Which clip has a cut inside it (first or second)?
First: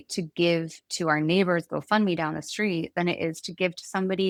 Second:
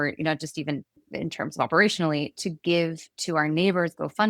second